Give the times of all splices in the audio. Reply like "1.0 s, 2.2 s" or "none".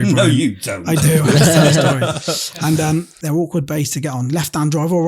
3.1 s

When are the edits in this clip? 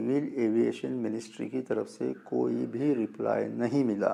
none

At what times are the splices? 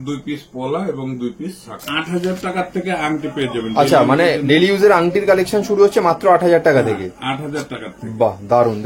1.8 s

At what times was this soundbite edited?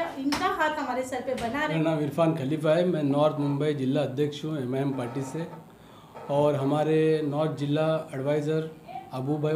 1.7 s

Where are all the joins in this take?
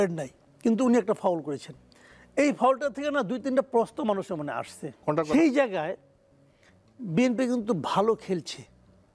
5.3 s

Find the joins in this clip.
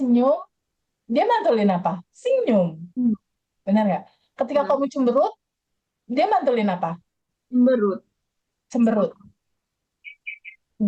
none

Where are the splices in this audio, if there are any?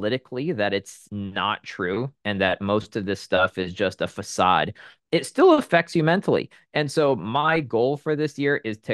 1.0 s

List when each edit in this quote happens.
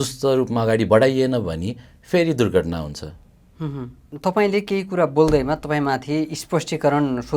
4.0 s

